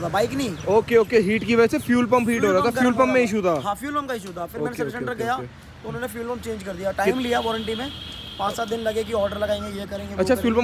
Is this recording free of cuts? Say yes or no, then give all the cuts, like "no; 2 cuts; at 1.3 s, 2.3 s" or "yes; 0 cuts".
yes; 0 cuts